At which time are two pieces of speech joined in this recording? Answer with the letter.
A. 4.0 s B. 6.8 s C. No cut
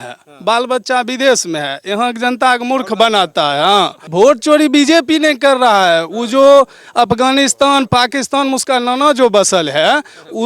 A